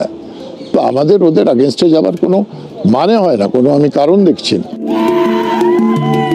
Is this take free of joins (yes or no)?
yes